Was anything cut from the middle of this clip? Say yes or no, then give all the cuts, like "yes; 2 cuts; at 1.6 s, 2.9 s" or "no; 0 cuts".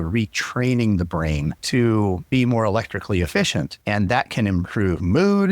yes; 3 cuts; at 1.6 s, 2.2 s, 3.8 s